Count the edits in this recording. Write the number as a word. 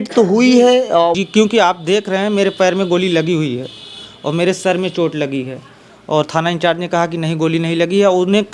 one